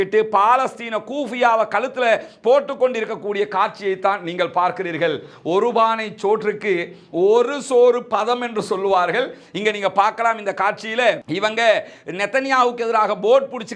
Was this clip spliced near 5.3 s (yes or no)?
no